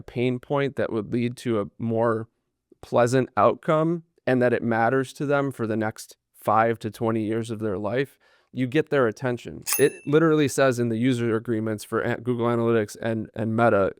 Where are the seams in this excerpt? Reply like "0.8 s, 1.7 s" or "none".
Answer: 9.7 s